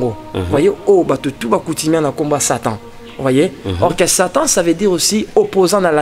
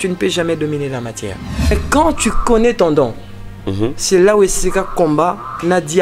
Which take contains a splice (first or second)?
second